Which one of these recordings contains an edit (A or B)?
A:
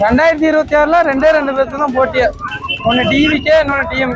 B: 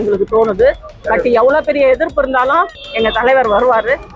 B